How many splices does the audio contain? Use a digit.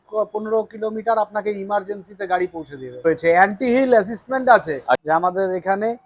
2